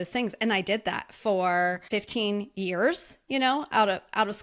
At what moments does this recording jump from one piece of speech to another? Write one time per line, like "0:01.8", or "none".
0:01.8